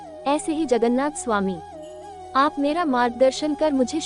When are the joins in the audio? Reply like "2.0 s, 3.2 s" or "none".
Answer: 2.2 s